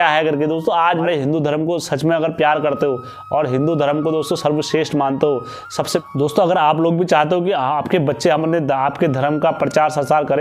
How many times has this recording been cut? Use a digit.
1